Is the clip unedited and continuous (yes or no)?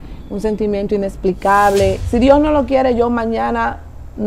no